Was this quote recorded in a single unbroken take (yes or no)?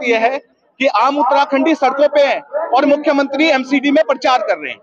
yes